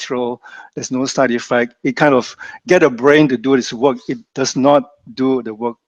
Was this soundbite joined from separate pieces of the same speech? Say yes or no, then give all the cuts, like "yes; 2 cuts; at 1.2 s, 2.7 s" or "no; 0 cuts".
no; 0 cuts